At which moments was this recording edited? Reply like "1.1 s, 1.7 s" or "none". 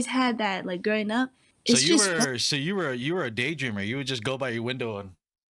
1.5 s